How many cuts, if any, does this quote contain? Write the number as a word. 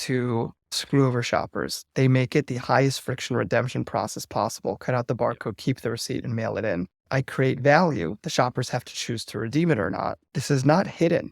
two